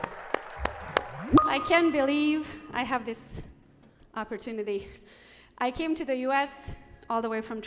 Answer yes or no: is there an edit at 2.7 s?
no